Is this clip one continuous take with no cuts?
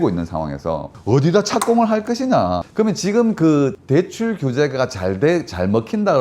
no; 1 cut; at 2.6 s

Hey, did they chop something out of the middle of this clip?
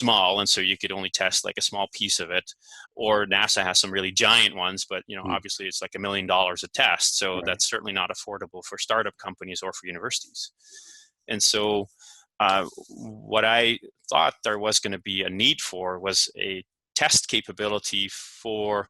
no; 0 cuts

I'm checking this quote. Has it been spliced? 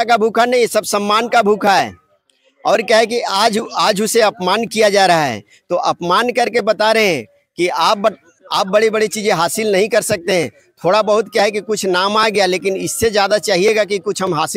no; 0 cuts

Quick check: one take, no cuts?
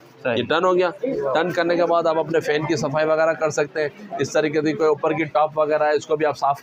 yes; 0 cuts

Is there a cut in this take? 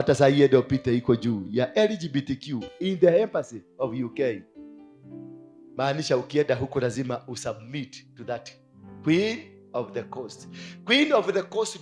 no; 0 cuts

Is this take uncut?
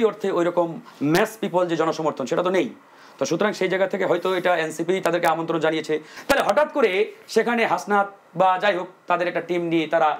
no; 1 cut; at 6.1 s

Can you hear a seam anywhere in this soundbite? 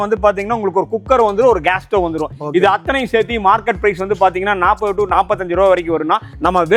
no; 0 cuts

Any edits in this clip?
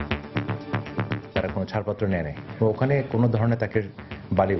yes; 1 cut; at 1.3 s

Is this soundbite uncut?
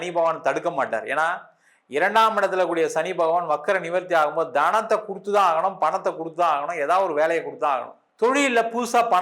no; 1 cut; at 8.0 s

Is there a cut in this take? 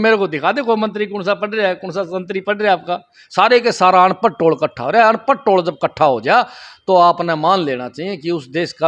no; 0 cuts

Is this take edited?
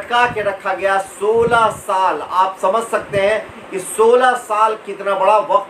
no; 0 cuts

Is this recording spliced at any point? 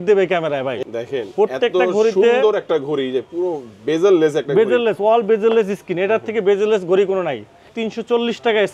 yes; 2 cuts; at 0.8 s, 7.7 s

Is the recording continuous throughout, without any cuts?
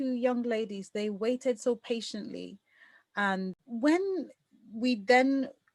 no; 1 cut; at 3.5 s

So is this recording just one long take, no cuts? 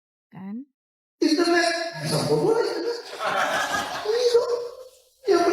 yes; 0 cuts

